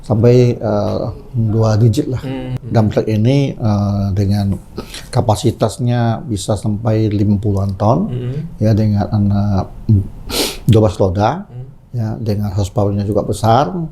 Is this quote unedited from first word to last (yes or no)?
no